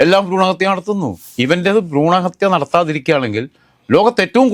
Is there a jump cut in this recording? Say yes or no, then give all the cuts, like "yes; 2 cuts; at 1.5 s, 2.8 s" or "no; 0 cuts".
yes; 1 cut; at 1.2 s